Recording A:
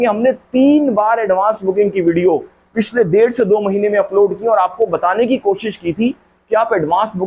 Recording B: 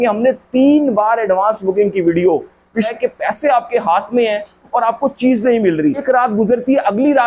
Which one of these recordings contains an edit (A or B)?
B